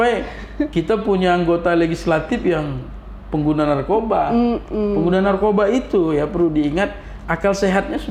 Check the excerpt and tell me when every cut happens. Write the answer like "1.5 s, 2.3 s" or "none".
none